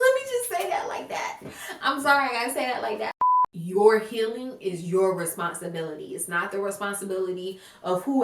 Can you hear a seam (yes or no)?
yes